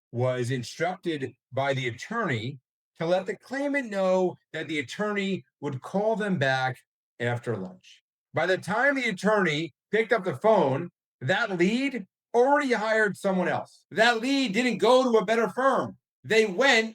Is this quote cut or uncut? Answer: cut